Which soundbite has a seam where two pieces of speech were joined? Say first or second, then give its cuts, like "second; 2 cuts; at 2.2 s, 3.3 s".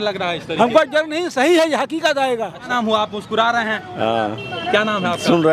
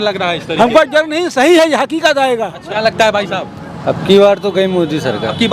second; 1 cut; at 2.6 s